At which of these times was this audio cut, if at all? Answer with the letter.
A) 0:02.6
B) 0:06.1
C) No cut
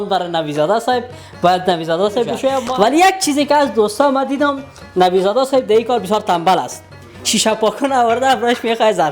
A